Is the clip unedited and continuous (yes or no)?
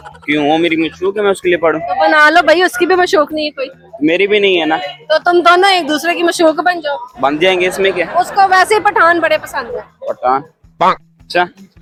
yes